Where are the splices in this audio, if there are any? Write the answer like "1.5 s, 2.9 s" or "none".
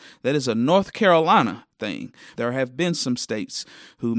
2.2 s